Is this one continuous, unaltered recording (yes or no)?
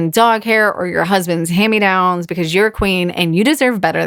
yes